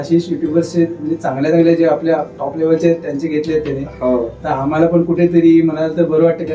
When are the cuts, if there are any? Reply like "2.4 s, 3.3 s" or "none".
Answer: none